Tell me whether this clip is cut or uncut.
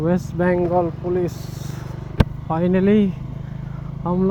uncut